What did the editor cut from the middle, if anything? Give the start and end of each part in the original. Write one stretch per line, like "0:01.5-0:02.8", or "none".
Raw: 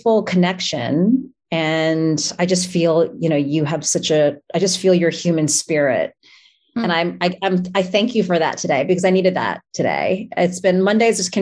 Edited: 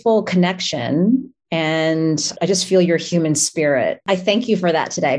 0:02.3-0:04.4
0:06.1-0:07.7